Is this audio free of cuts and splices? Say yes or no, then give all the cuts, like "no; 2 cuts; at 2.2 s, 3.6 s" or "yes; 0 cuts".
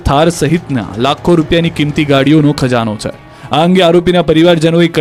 yes; 0 cuts